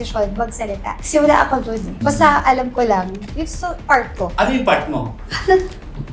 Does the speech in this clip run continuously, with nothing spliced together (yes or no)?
no